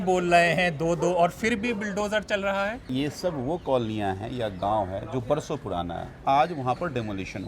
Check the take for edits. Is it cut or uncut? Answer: cut